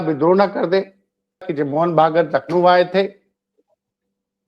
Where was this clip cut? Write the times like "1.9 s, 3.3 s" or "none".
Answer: 1.5 s